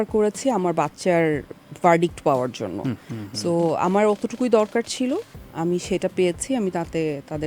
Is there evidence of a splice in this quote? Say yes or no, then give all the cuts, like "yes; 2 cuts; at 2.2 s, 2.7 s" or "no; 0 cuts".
no; 0 cuts